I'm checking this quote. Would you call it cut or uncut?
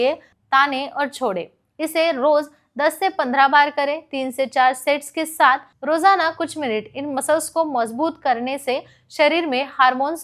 uncut